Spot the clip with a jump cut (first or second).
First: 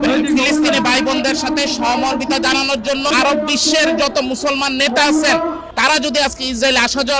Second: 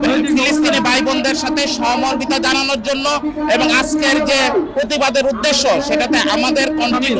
first